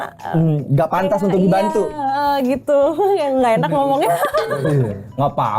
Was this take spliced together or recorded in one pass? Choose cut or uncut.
uncut